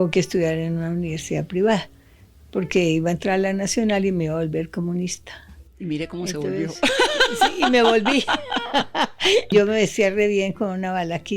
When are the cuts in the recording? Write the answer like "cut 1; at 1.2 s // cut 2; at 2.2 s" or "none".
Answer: cut 1; at 9.5 s